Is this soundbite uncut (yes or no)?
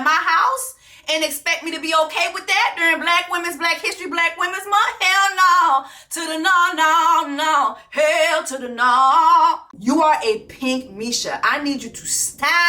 no